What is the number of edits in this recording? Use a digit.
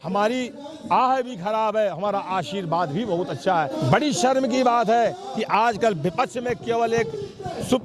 1